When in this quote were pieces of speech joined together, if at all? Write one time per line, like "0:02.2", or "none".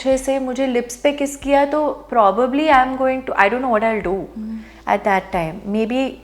none